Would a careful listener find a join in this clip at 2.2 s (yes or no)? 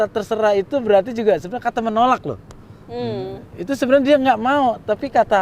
no